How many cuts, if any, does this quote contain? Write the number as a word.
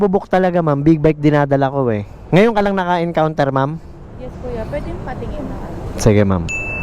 one